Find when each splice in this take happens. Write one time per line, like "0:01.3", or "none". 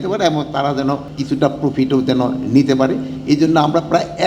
0:01.1